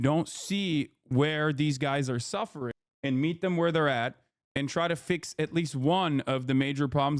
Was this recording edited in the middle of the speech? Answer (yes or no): no